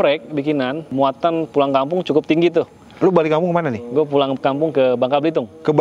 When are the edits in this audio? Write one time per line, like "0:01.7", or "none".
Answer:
0:00.9